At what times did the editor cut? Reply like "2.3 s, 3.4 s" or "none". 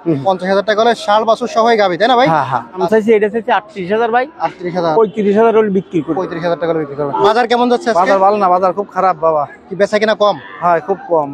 2.8 s, 7.3 s